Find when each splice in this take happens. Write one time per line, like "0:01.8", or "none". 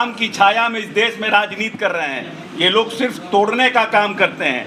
none